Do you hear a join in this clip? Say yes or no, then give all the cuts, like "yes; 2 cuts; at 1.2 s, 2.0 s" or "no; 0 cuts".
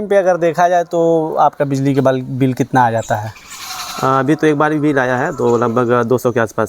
no; 0 cuts